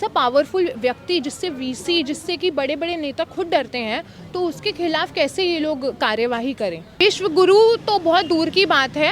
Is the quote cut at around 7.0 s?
yes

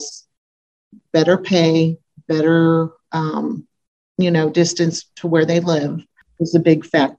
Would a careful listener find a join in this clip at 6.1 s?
yes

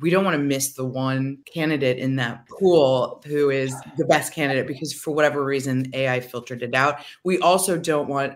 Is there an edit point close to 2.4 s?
yes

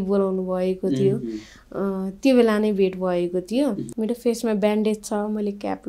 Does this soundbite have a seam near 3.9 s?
yes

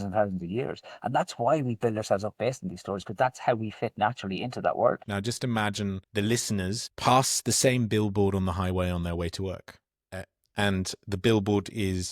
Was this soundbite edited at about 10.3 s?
no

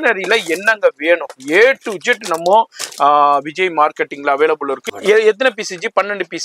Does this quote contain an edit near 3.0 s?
no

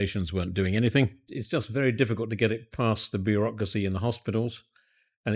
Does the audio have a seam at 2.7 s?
no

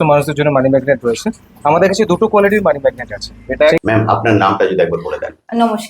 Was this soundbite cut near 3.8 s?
yes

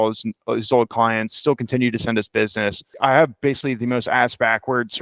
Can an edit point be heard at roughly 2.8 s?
yes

